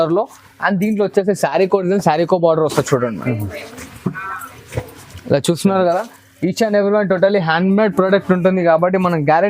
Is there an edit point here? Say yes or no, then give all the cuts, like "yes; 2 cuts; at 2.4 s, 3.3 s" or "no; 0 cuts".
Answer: no; 0 cuts